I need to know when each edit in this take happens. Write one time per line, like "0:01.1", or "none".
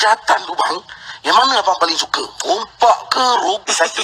none